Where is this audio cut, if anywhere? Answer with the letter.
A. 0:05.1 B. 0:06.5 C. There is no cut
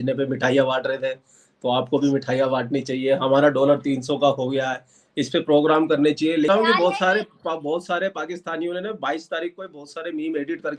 B